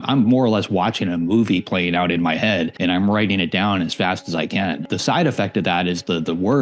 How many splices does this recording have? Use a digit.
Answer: 2